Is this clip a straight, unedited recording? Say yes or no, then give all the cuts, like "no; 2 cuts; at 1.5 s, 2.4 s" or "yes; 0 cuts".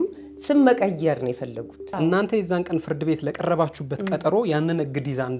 no; 1 cut; at 1.9 s